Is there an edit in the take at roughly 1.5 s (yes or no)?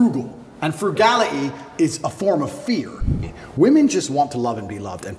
no